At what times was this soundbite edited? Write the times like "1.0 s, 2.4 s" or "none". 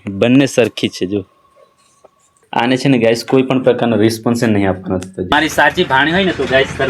2.4 s, 5.3 s